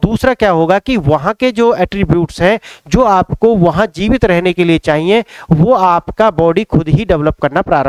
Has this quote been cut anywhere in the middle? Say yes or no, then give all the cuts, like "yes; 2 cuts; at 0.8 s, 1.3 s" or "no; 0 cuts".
no; 0 cuts